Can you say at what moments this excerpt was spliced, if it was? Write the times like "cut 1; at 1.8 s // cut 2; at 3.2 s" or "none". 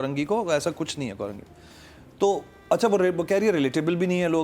none